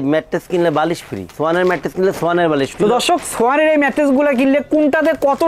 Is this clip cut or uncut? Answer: cut